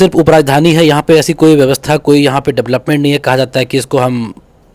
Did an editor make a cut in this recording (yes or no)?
no